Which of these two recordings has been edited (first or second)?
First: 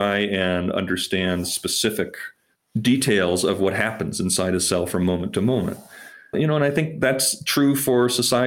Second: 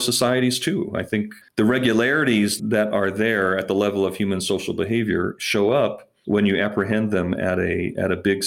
second